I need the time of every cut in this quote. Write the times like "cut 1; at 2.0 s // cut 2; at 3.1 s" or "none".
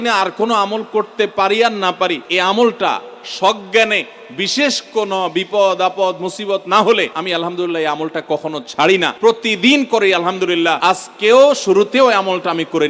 cut 1; at 2.3 s // cut 2; at 7.2 s // cut 3; at 9.1 s // cut 4; at 10.8 s